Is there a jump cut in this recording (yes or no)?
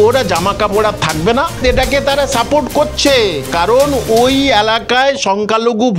yes